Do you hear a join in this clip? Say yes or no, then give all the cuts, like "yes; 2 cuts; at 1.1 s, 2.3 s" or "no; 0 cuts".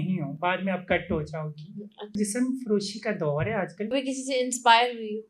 yes; 2 cuts; at 2.1 s, 3.9 s